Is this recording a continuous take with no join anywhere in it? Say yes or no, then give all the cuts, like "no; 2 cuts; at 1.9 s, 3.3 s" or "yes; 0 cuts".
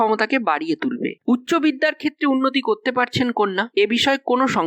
no; 1 cut; at 1.2 s